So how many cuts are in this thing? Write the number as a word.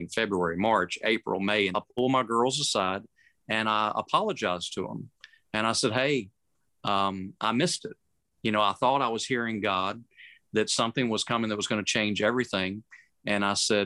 one